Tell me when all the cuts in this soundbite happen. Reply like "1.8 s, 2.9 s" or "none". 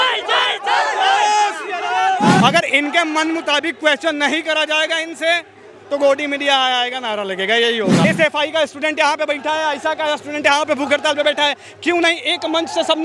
2.4 s, 8.0 s